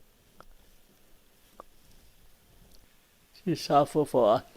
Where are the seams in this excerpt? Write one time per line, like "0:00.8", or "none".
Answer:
0:02.8